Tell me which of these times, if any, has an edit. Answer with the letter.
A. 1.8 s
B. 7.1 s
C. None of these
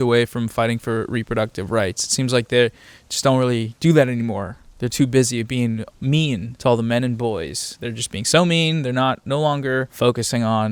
C